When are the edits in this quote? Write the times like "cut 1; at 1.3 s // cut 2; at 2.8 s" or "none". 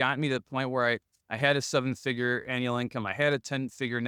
none